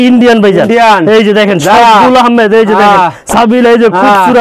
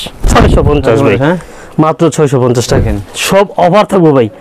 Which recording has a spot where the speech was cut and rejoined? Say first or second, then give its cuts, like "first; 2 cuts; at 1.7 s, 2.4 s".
second; 1 cut; at 2.8 s